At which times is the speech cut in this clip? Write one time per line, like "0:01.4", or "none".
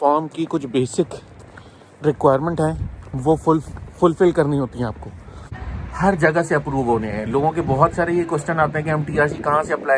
0:05.6